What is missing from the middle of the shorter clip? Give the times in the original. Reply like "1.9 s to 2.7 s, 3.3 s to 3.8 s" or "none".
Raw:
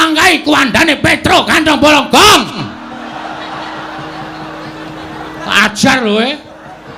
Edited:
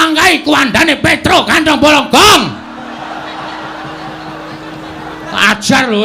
2.5 s to 2.6 s